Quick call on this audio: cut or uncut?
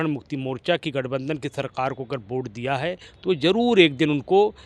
uncut